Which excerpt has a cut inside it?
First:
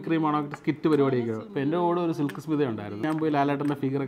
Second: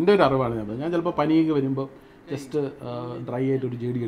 first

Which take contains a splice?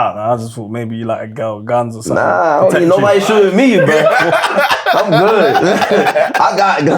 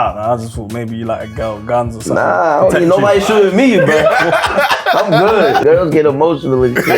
second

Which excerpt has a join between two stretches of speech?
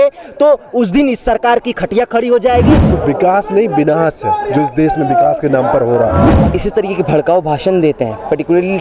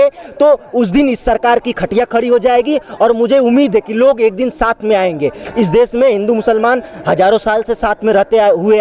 first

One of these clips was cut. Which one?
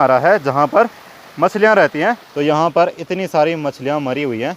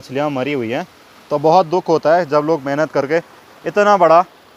first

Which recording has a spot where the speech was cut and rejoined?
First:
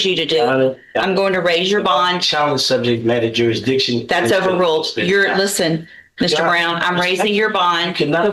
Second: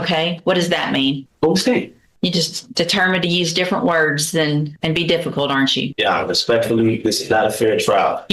second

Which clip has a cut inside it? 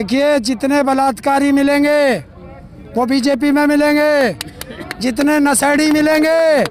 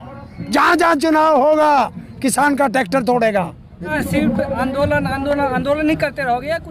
second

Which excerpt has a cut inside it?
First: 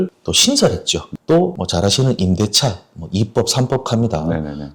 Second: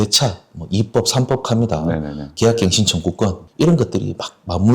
second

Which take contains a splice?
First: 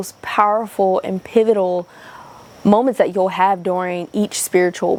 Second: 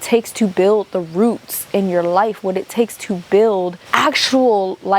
second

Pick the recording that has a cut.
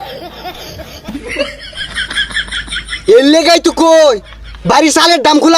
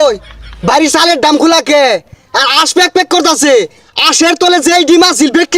first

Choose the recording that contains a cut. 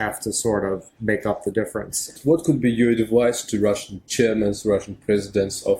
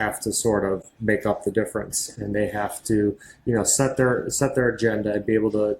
first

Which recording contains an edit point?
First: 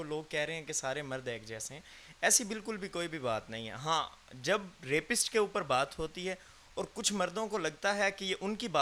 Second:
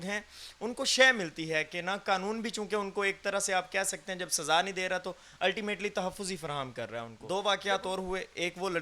second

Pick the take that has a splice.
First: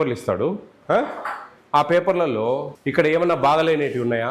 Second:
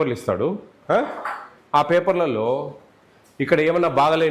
first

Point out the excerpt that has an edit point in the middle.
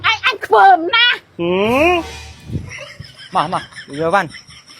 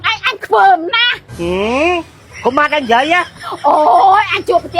first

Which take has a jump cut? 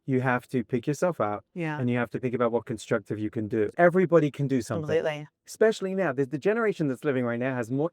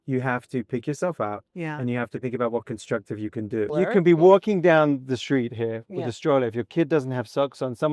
second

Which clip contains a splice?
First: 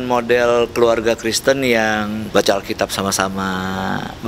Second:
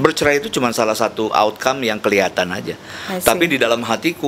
first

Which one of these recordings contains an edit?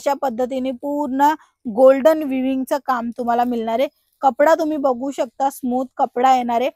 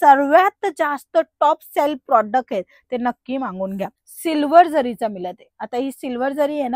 second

